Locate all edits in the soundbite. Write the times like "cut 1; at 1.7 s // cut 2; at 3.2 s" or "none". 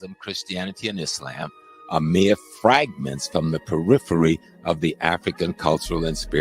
cut 1; at 0.9 s

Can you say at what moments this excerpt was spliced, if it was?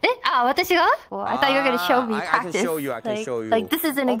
cut 1; at 1.1 s

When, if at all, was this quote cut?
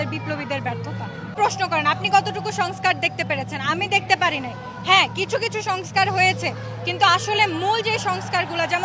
cut 1; at 1.4 s

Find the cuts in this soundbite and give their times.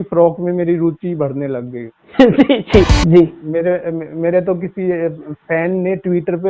cut 1; at 2.9 s

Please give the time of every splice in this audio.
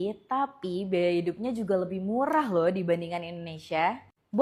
none

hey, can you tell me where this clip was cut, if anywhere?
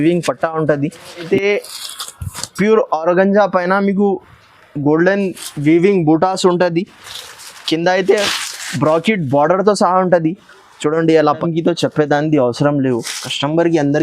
cut 1; at 1.3 s // cut 2; at 11.4 s

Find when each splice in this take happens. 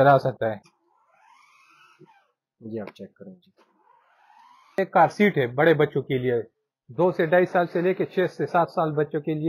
cut 1; at 4.8 s

